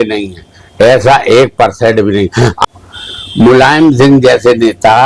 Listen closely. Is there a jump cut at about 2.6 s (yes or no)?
yes